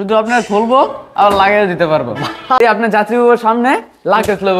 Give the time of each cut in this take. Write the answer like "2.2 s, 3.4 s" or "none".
2.6 s